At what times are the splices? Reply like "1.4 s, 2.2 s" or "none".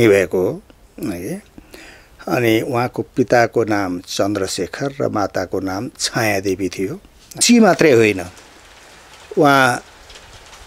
7.4 s